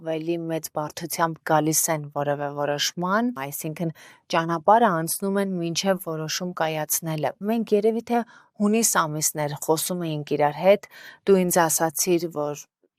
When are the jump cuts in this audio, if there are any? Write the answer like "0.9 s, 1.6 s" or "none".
none